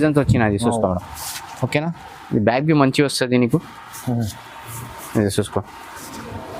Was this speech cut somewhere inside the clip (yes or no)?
no